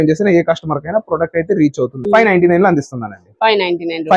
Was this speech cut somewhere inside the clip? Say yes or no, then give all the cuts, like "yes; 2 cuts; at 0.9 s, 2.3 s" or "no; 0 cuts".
yes; 1 cut; at 2.0 s